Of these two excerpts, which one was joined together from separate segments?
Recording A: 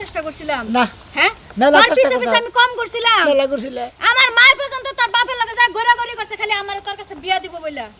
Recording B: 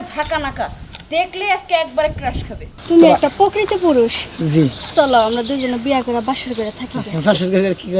B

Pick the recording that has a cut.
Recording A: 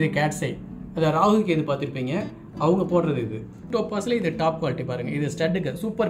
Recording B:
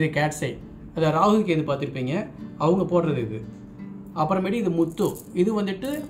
A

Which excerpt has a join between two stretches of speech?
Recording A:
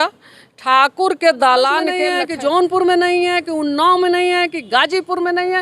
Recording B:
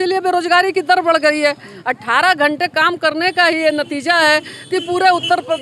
A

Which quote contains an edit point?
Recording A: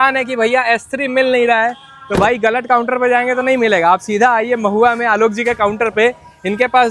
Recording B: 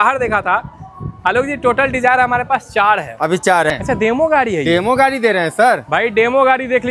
B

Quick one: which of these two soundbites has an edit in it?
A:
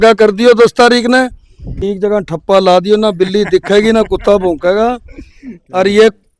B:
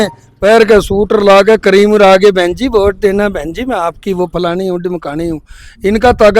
A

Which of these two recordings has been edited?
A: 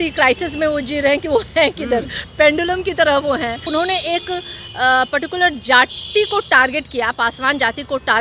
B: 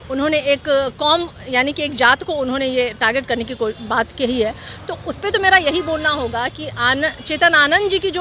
A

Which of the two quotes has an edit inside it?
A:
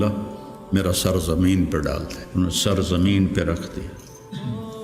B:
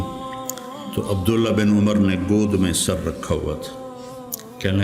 A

